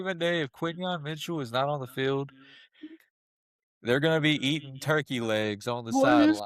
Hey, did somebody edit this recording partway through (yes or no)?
no